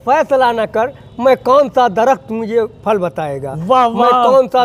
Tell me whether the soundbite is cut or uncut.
uncut